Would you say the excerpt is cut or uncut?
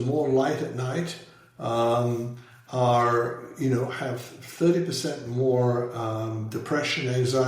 uncut